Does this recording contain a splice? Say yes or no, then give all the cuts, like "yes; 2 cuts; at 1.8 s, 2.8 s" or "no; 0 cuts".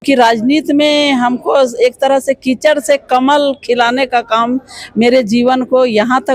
no; 0 cuts